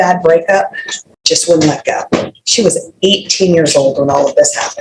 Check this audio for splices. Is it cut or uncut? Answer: uncut